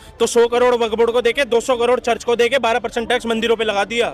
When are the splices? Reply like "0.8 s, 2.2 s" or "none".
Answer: none